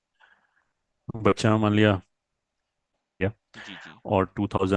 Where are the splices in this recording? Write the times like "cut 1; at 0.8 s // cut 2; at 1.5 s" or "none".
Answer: cut 1; at 3.0 s